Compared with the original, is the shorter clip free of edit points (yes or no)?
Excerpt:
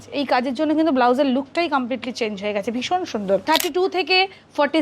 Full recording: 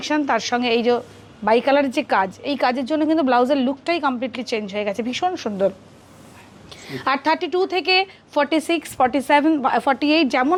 no